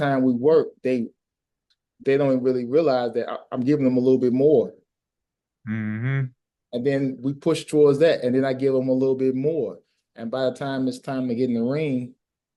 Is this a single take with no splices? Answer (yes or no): yes